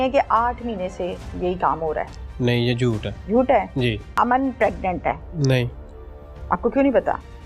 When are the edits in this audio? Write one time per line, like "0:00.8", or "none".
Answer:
0:03.1
0:04.1
0:05.3